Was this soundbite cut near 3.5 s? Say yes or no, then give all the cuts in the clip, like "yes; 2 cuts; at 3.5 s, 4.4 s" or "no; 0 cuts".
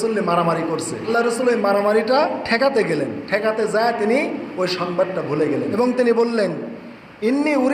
no; 2 cuts; at 1.1 s, 5.8 s